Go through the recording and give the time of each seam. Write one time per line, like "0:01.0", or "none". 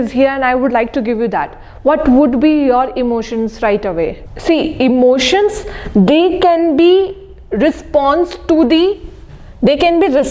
0:04.3